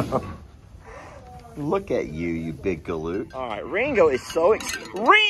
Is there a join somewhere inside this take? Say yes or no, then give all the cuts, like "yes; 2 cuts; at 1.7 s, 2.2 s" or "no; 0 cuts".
yes; 1 cut; at 3.3 s